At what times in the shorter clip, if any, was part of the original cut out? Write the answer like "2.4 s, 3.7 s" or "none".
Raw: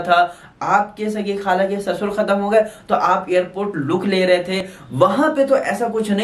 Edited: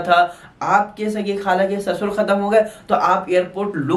none

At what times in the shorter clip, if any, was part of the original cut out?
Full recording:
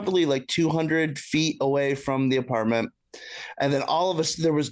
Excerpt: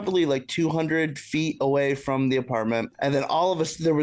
2.9 s

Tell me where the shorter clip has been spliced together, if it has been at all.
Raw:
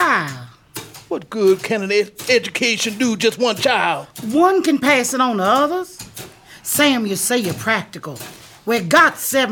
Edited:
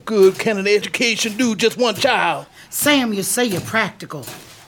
0.9 s, 2.5 s

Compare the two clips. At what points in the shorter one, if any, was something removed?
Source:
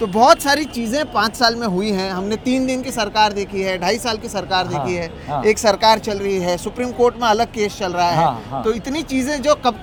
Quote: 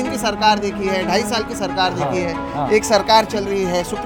none

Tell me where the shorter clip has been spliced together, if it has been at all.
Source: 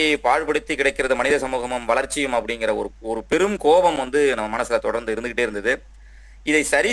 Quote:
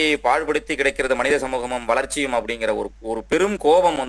none

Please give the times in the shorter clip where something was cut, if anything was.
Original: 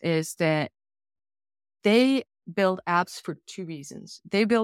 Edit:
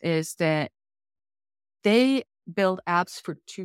none

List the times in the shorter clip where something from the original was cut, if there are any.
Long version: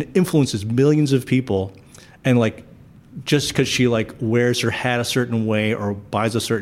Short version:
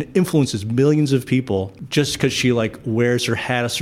1.8 s

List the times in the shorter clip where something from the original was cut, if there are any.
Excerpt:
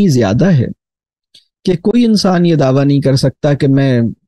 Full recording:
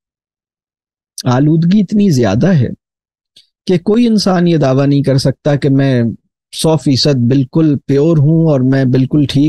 none

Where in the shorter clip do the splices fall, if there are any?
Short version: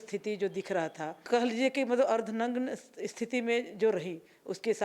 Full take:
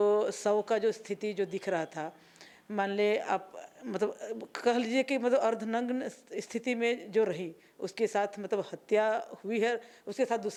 1.2 s

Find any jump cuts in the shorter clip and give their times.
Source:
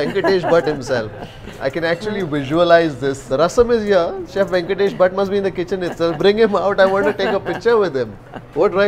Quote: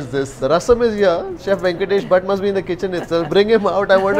none

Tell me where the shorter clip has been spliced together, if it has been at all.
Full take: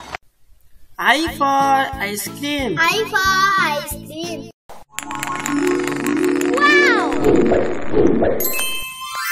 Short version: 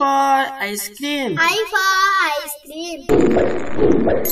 3.1 s

